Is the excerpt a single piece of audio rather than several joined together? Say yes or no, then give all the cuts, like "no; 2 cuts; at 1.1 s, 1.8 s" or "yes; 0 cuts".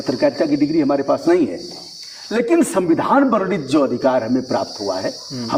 yes; 0 cuts